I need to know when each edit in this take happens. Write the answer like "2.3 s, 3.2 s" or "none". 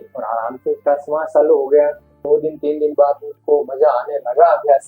2.2 s